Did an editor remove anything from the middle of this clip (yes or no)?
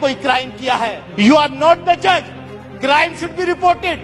yes